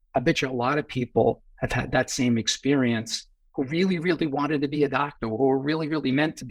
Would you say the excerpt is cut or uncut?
uncut